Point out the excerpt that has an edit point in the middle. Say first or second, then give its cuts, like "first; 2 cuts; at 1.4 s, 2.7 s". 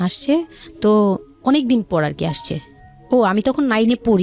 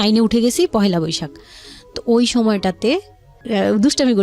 second; 1 cut; at 3.3 s